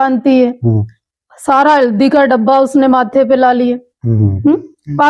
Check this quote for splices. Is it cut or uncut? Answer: uncut